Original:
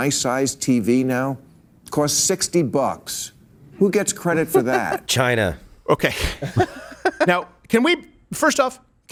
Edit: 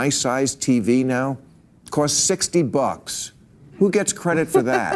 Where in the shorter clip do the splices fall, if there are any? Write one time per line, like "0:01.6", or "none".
none